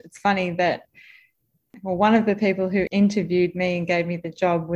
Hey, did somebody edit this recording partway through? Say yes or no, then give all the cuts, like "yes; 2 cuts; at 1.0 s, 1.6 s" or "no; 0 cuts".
yes; 2 cuts; at 1.6 s, 2.9 s